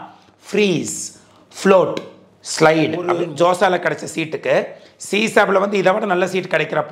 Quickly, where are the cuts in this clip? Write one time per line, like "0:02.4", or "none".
0:03.2